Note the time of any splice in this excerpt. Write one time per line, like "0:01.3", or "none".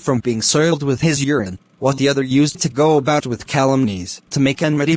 none